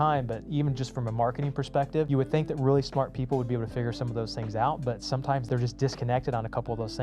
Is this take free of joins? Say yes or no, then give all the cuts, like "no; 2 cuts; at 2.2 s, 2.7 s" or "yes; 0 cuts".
no; 2 cuts; at 2.1 s, 5.4 s